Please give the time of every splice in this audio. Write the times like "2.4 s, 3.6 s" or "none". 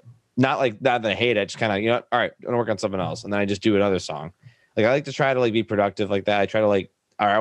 none